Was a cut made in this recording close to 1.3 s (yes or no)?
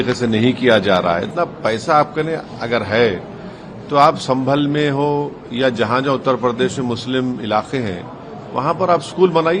yes